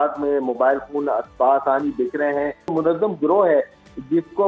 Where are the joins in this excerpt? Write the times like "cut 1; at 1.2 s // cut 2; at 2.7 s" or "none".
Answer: cut 1; at 2.7 s